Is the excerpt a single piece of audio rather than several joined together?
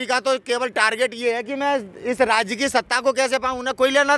yes; 0 cuts

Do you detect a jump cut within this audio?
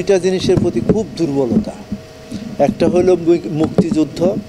no; 0 cuts

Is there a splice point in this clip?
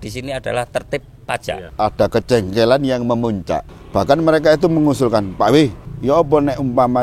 yes; 3 cuts; at 1.6 s, 3.7 s, 5.9 s

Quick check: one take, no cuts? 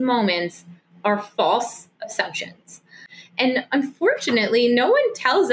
no; 1 cut; at 3.0 s

